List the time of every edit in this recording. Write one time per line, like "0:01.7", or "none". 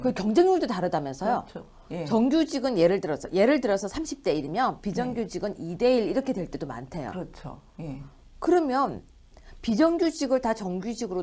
0:06.5